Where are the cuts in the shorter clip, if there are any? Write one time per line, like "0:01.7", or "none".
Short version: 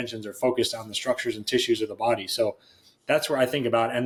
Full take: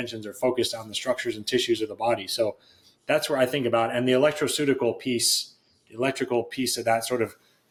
none